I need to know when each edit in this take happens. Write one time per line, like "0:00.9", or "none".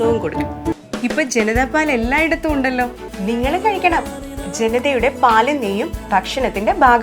0:00.7
0:03.0